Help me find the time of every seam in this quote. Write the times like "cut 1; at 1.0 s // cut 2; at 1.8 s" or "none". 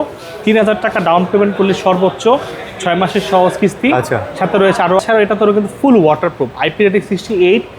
cut 1; at 5.0 s